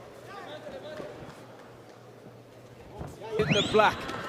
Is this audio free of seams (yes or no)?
no